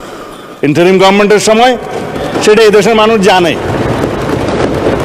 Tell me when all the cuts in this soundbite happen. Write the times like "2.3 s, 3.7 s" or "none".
none